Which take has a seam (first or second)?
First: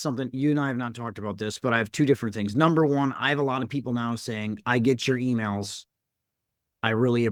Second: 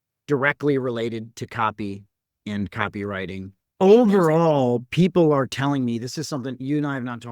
second